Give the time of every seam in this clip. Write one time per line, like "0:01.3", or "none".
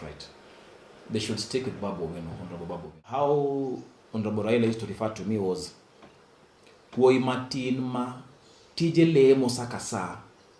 0:03.0